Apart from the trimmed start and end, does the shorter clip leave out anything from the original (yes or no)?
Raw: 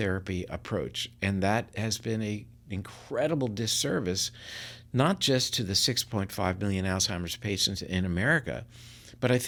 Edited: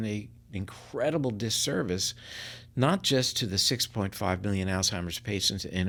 no